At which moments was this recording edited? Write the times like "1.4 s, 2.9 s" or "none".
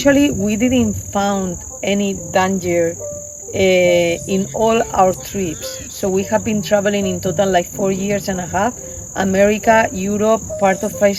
none